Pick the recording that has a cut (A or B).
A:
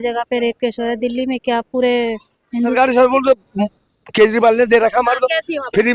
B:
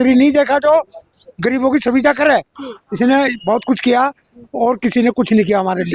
A